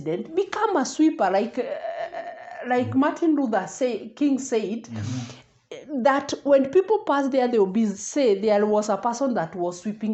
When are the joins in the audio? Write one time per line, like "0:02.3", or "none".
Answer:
none